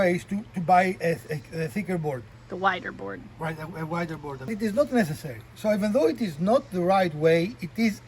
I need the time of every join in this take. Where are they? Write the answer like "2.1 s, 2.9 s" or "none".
2.4 s, 4.5 s